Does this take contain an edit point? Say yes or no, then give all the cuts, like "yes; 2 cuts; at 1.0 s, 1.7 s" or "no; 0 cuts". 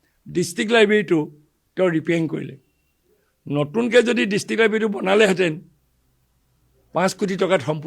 no; 0 cuts